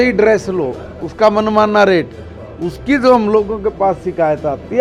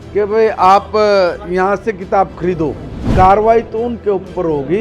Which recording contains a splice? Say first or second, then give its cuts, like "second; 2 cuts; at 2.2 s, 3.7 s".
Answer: second; 1 cut; at 3.0 s